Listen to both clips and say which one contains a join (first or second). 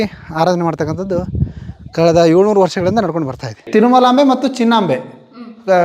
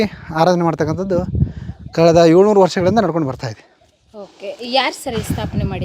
first